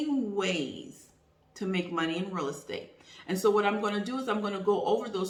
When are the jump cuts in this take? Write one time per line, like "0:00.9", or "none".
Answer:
none